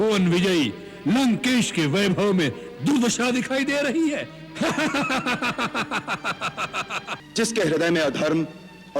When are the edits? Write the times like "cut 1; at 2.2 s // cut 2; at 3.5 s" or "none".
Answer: cut 1; at 7.2 s